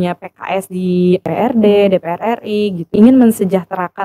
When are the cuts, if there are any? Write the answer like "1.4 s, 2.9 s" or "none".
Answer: 1.3 s, 2.9 s